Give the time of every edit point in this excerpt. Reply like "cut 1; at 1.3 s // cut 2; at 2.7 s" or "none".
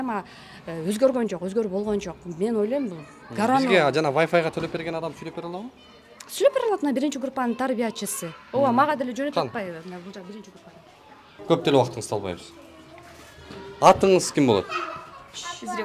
none